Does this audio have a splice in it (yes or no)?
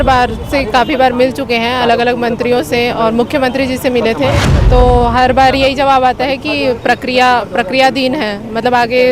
no